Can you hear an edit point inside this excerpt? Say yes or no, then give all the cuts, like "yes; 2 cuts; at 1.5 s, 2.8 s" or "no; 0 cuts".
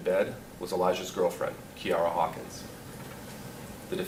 no; 0 cuts